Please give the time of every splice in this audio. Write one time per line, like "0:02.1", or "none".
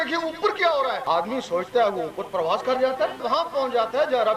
0:01.0
0:03.2